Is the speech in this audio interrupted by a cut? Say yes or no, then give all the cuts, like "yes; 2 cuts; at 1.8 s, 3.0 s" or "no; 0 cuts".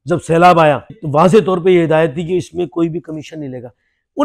yes; 1 cut; at 1.0 s